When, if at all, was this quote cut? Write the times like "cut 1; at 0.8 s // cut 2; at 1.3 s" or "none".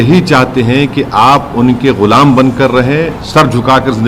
cut 1; at 3.2 s